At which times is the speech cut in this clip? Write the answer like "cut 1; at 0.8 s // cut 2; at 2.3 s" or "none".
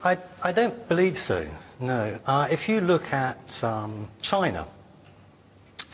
cut 1; at 4.4 s